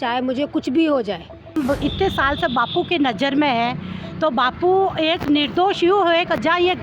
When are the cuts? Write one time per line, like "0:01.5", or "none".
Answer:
0:01.6